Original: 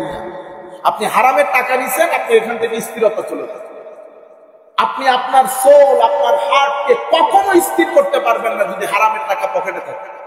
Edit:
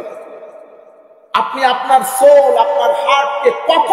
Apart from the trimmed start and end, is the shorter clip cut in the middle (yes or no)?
no